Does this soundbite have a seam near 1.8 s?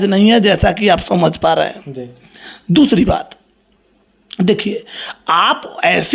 no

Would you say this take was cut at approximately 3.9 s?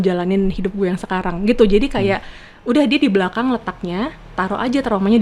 no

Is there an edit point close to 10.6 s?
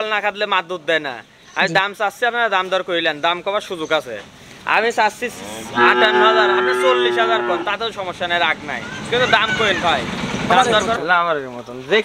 yes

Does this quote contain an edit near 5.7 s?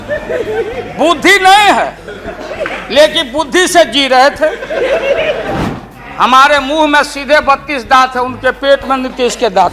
yes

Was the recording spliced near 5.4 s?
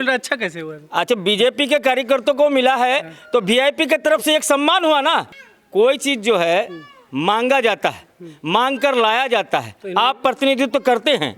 yes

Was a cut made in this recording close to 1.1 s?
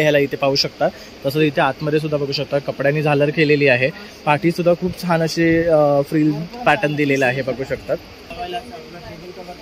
no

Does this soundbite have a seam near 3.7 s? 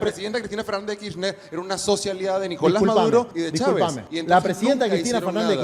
yes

